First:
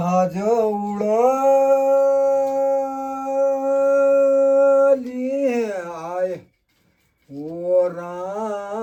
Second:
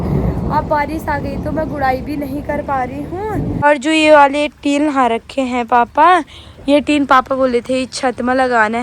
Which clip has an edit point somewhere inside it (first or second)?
second